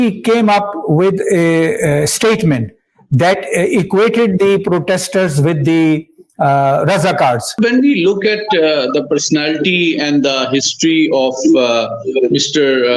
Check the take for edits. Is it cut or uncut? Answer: cut